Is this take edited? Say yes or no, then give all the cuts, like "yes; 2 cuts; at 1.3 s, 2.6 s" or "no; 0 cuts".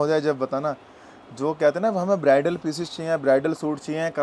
no; 0 cuts